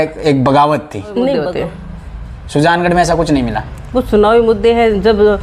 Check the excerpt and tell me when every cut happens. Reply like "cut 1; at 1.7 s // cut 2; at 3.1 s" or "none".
cut 1; at 1.4 s